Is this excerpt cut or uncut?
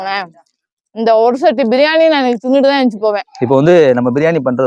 cut